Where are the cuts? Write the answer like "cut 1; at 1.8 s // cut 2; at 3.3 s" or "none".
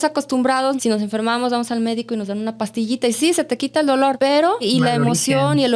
cut 1; at 0.8 s // cut 2; at 4.6 s